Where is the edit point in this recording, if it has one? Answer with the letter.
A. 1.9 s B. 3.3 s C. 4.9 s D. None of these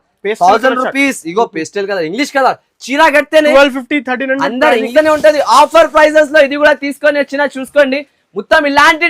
C